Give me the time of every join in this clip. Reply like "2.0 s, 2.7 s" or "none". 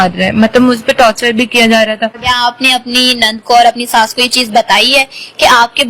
2.2 s